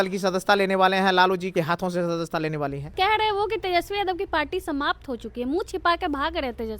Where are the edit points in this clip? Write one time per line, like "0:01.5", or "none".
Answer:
0:01.5
0:02.9